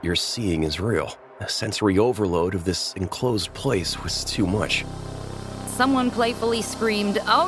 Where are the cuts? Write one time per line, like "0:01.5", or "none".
0:05.4